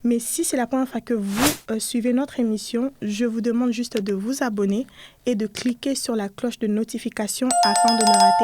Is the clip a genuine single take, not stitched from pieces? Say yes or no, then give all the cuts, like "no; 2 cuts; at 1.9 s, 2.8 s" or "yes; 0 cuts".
no; 1 cut; at 7.5 s